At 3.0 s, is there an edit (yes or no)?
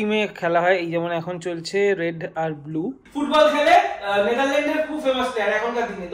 yes